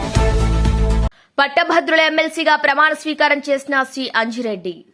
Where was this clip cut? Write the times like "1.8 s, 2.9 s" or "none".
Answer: none